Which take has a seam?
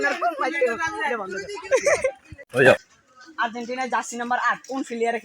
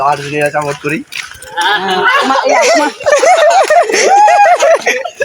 first; 1 cut; at 2.9 s

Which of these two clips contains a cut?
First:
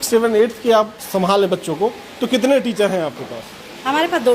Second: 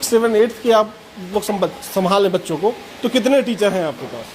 first; 1 cut; at 1.0 s

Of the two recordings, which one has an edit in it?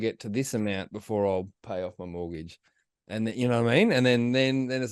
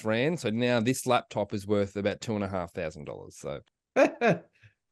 second; 1 cut; at 3.7 s

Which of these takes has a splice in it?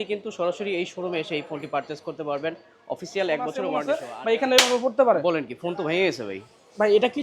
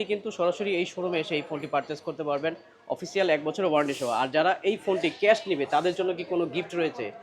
first; 1 cut; at 3.8 s

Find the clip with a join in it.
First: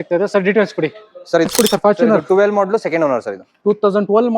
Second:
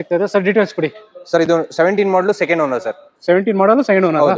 first; 1 cut; at 1.5 s

